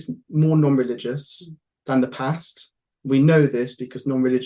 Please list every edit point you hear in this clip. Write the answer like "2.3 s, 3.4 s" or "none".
none